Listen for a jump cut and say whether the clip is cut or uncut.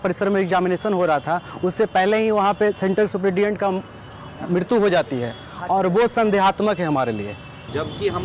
uncut